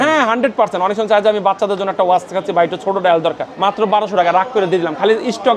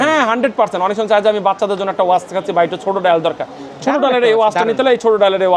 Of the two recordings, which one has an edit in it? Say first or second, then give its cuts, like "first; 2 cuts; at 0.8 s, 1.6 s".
first; 1 cut; at 3.5 s